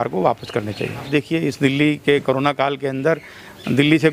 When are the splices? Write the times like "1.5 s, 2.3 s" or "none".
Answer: 1.1 s